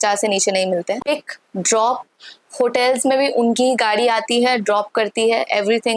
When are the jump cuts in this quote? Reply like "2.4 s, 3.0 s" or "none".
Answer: 1.0 s